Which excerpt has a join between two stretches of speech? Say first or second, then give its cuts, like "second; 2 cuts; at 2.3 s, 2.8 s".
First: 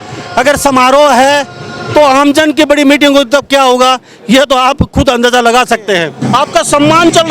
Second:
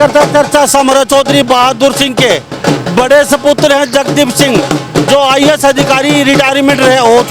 first; 1 cut; at 6.1 s